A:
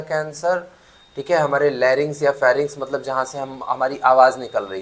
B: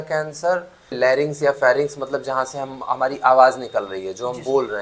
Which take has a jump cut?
B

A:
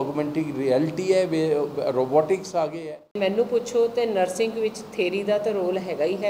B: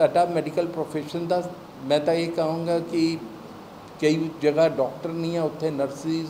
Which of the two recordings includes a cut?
A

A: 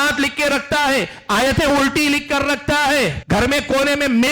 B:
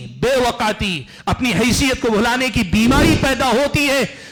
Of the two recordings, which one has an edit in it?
A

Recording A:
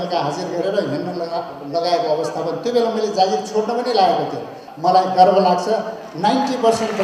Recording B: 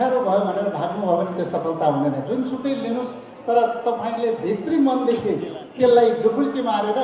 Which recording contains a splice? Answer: A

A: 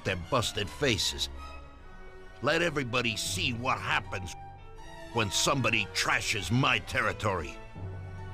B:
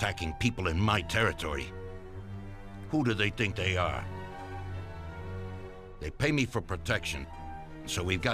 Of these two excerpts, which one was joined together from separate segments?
A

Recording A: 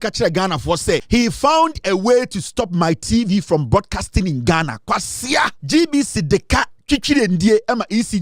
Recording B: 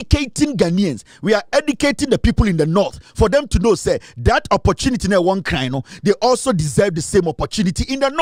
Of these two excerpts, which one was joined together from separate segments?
A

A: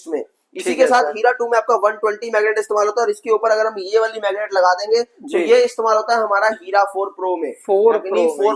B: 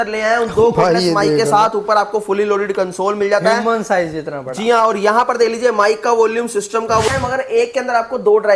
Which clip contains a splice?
B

